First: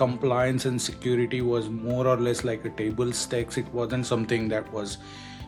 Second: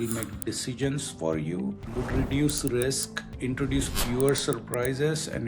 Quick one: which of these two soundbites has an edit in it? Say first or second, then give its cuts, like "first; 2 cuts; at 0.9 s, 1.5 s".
second; 2 cuts; at 1.9 s, 3.3 s